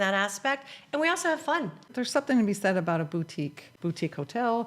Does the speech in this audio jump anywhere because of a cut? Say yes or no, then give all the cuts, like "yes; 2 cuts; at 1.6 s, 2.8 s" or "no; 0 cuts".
yes; 2 cuts; at 1.8 s, 3.6 s